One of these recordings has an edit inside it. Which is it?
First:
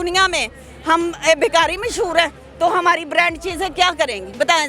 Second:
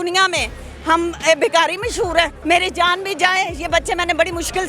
second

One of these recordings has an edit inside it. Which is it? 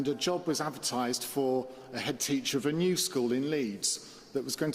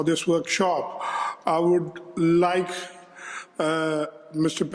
first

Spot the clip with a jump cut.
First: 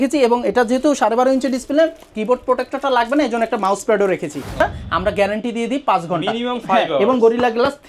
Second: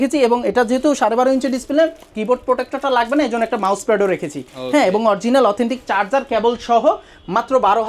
first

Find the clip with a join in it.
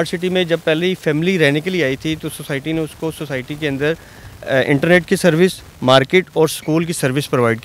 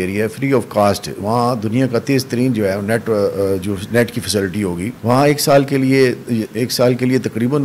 second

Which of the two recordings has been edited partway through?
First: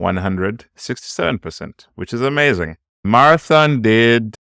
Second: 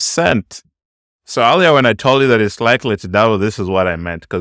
first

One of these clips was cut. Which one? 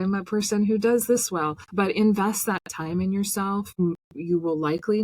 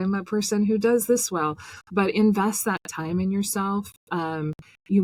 first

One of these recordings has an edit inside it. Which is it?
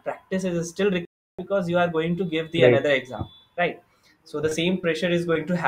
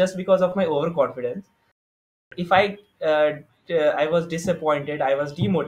second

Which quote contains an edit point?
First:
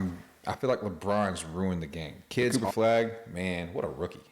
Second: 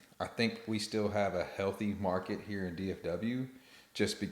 first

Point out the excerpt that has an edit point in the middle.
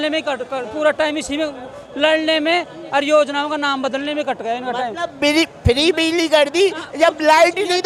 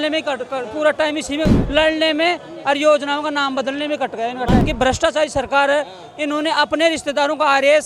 second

